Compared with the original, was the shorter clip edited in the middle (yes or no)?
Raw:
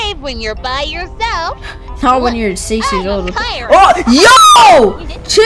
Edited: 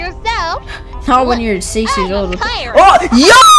no